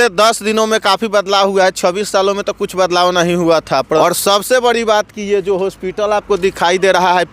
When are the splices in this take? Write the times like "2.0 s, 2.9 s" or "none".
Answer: 4.0 s